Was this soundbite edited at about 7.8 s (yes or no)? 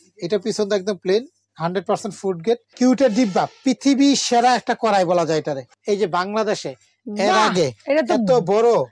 no